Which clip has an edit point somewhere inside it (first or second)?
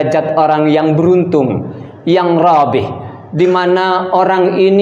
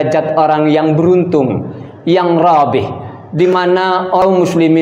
second